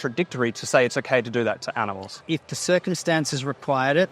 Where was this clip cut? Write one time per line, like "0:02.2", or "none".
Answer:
0:02.1